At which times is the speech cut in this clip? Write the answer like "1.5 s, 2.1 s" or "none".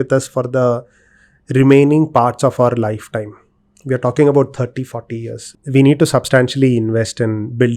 5.5 s